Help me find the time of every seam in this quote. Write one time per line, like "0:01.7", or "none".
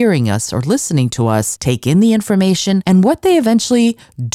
0:01.5
0:02.8